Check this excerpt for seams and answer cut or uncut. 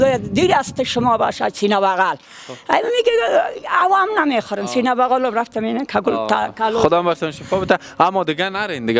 uncut